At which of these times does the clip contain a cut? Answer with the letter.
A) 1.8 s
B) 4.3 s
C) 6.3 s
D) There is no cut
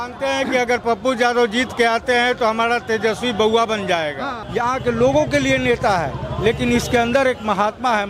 B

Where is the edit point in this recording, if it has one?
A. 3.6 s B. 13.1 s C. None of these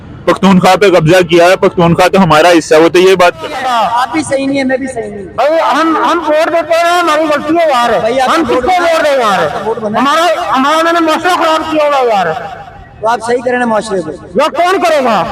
A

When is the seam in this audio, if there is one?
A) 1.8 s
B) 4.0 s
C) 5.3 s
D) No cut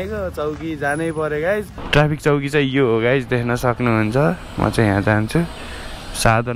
A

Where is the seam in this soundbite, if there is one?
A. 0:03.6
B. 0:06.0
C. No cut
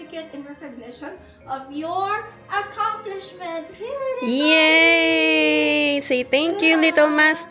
C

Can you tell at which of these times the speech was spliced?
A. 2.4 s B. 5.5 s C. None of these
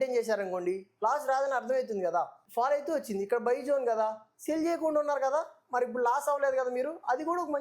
A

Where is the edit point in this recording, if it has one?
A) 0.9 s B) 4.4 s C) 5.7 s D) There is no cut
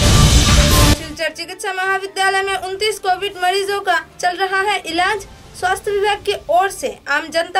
A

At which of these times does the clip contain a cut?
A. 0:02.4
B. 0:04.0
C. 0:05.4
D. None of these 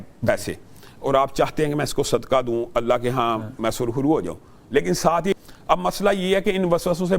C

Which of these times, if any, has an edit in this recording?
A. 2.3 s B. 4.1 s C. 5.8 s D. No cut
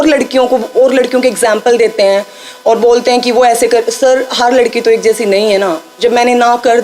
D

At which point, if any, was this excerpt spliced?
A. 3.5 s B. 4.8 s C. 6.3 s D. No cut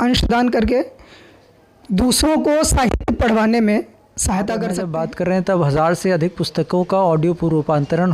B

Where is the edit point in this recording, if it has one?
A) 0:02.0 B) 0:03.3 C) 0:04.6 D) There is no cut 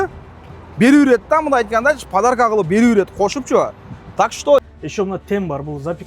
C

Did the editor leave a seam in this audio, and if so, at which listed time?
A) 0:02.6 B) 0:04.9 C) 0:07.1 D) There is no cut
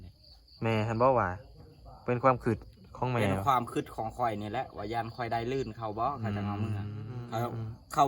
C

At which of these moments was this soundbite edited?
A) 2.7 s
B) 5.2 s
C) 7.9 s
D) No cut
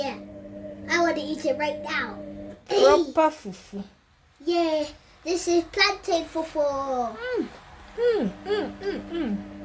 D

